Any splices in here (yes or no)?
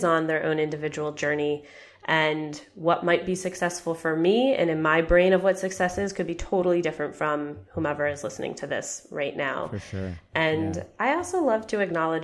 no